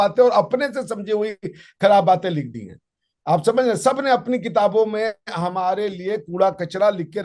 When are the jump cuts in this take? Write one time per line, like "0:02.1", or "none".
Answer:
none